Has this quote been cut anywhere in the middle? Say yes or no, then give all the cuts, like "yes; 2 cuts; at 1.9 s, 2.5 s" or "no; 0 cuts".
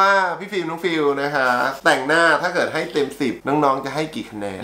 yes; 2 cuts; at 1.7 s, 3.4 s